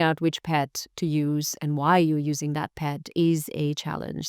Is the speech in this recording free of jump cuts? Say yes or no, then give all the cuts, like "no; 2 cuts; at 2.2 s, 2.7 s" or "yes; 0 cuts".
yes; 0 cuts